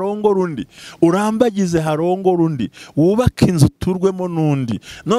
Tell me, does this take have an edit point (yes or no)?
no